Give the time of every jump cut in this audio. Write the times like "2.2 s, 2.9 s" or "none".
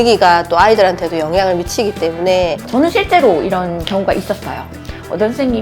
2.7 s